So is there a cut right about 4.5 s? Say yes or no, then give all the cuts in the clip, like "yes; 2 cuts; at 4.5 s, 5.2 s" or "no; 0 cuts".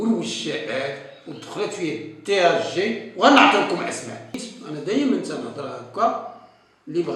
yes; 1 cut; at 4.5 s